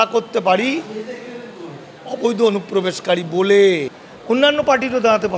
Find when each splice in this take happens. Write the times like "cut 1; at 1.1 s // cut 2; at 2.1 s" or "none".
cut 1; at 4.4 s

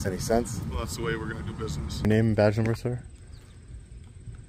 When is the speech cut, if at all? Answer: cut 1; at 2.1 s

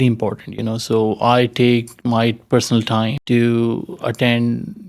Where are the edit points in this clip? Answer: cut 1; at 3.2 s

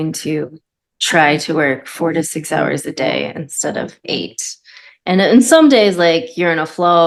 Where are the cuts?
none

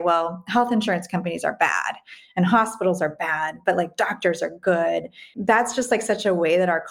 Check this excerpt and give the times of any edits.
cut 1; at 5.3 s

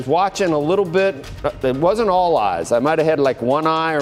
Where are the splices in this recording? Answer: none

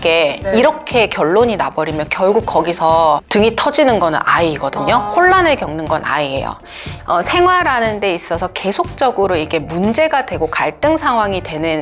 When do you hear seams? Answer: cut 1; at 6.9 s

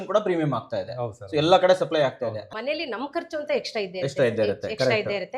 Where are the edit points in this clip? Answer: cut 1; at 2.4 s

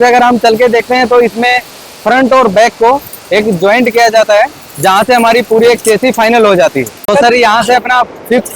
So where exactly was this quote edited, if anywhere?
cut 1; at 7.0 s

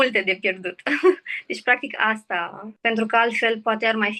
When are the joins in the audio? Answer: cut 1; at 2.6 s

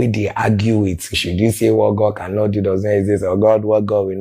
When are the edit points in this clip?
cut 1; at 1.2 s

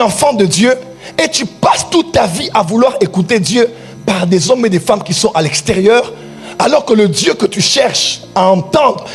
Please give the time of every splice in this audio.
none

